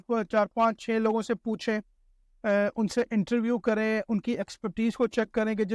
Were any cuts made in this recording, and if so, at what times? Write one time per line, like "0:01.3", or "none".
none